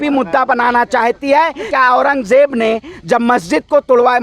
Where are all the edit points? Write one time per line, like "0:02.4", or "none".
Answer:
0:01.7